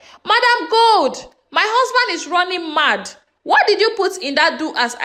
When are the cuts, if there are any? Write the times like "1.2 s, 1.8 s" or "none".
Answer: none